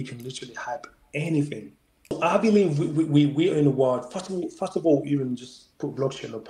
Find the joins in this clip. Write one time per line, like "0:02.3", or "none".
0:02.2

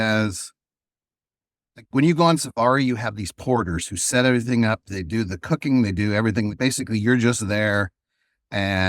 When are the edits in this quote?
0:04.9
0:06.5

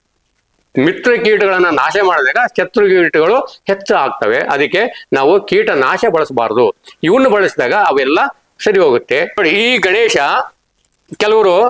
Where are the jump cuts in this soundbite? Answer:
0:09.4

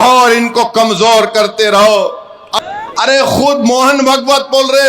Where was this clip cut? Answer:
0:02.5

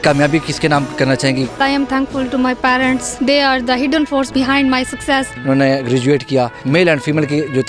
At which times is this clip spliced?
0:01.6
0:03.1
0:04.3
0:05.3
0:06.6

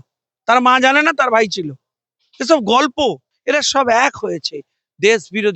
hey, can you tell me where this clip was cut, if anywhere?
0:03.3

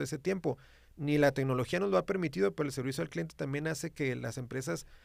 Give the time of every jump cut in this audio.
none

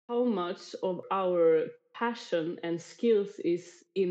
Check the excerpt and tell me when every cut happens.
0:01.0
0:01.8

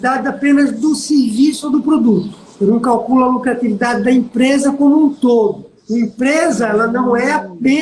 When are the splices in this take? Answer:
none

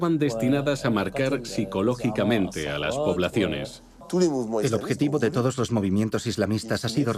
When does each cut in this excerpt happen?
0:03.9

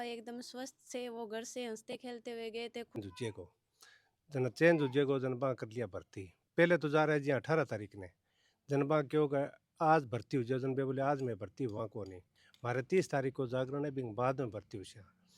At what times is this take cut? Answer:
0:03.0

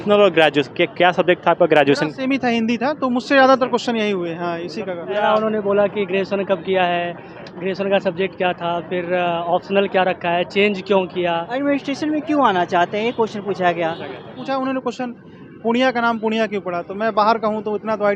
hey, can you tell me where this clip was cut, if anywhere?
0:05.2
0:11.5
0:14.4

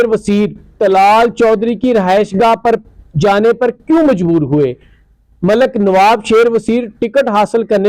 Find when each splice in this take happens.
none

